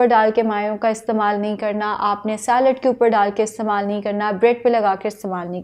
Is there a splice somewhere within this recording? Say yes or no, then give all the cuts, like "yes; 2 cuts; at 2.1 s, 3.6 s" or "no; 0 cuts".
no; 0 cuts